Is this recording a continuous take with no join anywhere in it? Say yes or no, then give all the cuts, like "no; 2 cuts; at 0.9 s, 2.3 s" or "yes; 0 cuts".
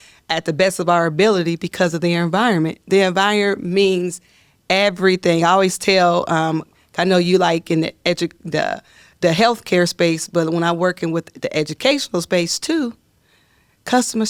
yes; 0 cuts